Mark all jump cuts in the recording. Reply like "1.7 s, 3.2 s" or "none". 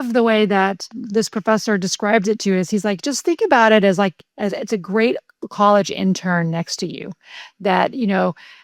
0.9 s